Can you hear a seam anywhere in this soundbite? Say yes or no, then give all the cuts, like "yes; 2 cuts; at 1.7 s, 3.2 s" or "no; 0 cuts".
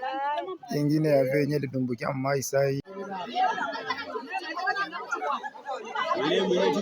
yes; 1 cut; at 2.8 s